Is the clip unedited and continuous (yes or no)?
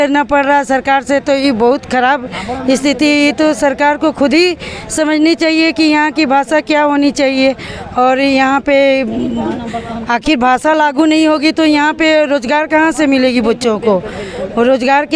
yes